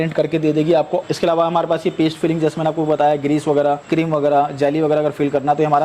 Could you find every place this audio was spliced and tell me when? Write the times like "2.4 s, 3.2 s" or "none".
1.0 s, 3.8 s